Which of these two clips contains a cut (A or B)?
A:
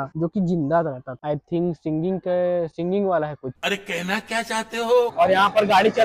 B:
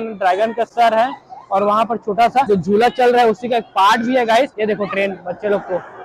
A